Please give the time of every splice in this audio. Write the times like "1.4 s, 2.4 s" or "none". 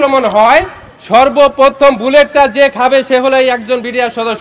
none